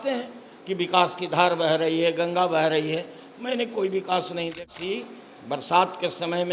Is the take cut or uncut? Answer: cut